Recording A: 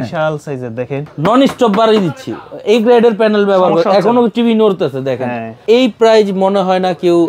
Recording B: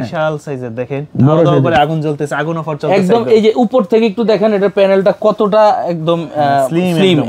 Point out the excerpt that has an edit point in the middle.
A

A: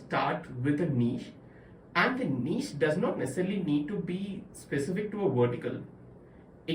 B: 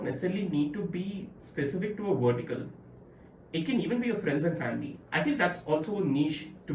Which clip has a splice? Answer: B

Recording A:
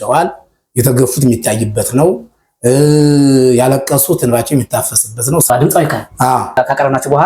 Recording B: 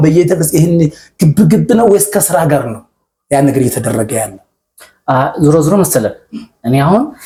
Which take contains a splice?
A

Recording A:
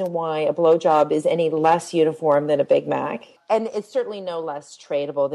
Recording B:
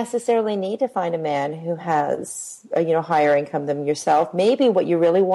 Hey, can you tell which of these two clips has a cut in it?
A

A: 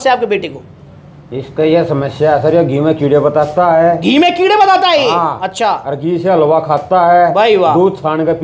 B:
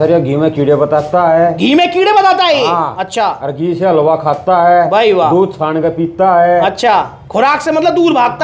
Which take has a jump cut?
B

